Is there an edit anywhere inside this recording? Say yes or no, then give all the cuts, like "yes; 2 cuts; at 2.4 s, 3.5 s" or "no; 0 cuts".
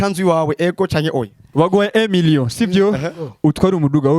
yes; 1 cut; at 1.4 s